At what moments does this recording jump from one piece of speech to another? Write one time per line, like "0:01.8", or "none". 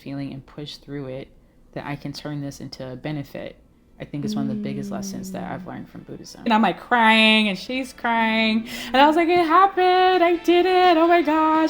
0:06.5